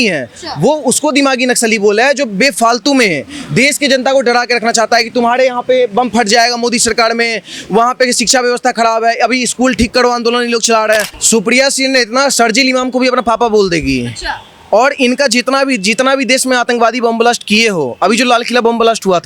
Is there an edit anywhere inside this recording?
yes; 1 cut; at 11.2 s

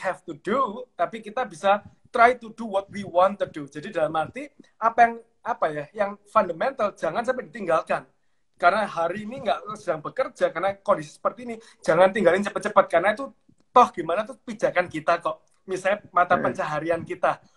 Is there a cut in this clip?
no; 0 cuts

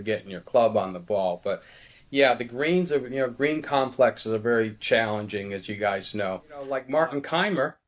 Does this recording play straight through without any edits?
no; 1 cut; at 6.8 s

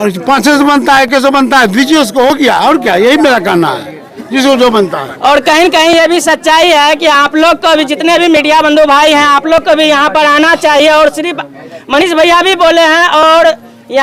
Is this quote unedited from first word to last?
yes; 0 cuts

